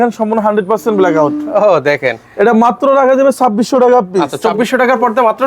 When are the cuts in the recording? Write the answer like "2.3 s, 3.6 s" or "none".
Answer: 4.3 s